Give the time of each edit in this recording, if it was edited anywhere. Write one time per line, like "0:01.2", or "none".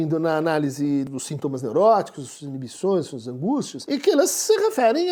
0:01.1
0:03.8